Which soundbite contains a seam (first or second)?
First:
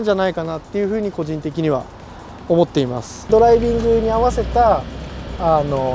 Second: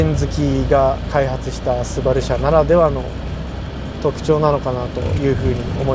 first